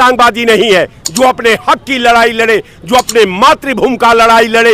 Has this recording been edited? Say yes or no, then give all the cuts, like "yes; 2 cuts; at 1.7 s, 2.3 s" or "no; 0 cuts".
no; 0 cuts